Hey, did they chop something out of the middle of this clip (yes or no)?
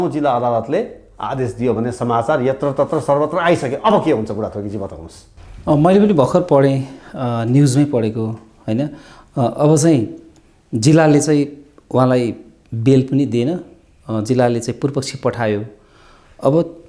no